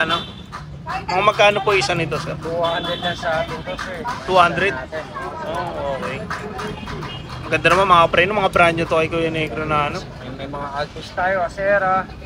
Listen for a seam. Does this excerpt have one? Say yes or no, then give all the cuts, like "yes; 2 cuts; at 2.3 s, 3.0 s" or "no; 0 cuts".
no; 0 cuts